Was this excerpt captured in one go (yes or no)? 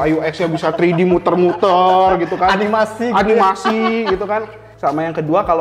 no